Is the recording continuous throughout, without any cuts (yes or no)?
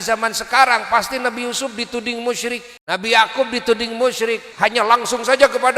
no